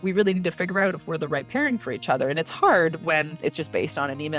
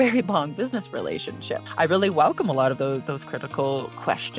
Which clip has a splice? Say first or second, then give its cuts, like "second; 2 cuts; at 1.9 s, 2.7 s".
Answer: first; 1 cut; at 3.3 s